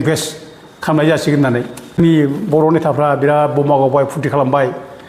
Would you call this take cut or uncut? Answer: cut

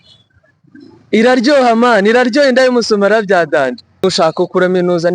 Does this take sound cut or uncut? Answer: cut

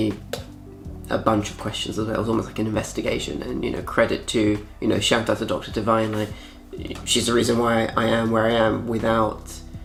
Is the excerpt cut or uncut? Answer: uncut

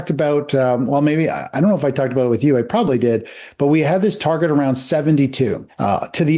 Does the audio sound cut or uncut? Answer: uncut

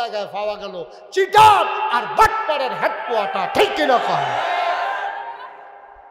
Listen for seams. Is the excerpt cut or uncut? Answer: uncut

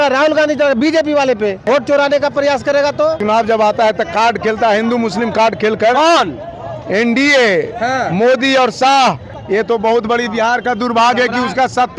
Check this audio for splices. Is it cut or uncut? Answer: cut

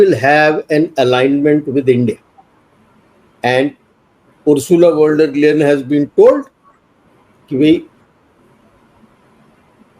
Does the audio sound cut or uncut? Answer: uncut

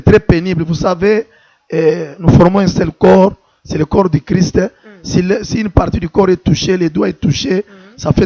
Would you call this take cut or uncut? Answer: uncut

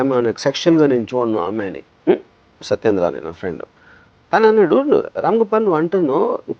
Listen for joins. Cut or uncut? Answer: cut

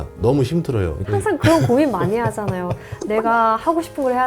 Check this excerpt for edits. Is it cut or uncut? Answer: cut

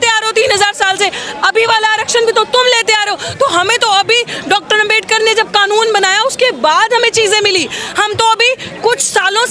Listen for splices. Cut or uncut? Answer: uncut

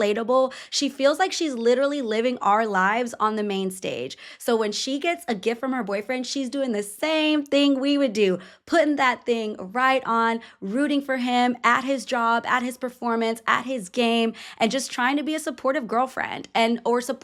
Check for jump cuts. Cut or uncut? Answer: uncut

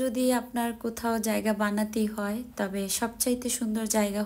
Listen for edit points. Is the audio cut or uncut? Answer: uncut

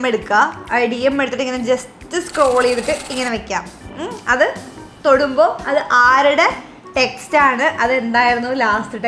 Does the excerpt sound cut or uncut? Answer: uncut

